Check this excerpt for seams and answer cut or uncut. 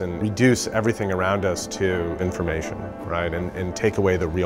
cut